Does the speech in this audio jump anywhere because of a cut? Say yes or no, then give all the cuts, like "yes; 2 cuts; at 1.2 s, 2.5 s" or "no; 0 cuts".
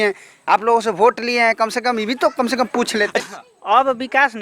yes; 1 cut; at 3.2 s